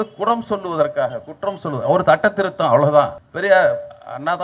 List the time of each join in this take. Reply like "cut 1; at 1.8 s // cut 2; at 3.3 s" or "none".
cut 1; at 3.3 s